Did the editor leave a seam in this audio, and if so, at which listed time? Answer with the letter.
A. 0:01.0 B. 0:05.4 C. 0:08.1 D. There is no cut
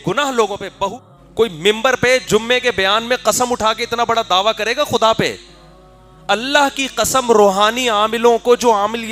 A